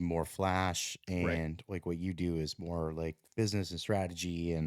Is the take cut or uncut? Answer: uncut